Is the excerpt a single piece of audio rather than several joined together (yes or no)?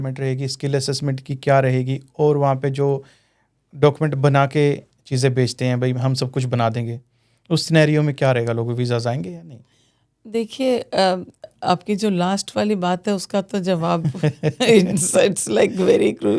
yes